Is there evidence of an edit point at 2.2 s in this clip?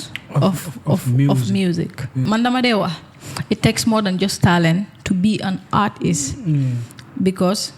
yes; 1 cut; at 2.2 s

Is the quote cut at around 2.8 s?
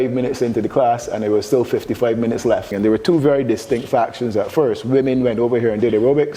yes; 1 cut; at 2.8 s

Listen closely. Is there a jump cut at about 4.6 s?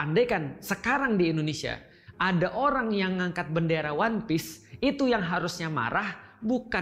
no; 0 cuts

